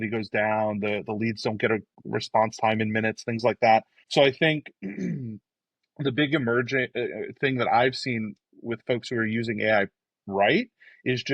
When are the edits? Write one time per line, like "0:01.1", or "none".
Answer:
0:02.0
0:04.0